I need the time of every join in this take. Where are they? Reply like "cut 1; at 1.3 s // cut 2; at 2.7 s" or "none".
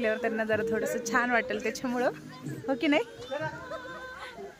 none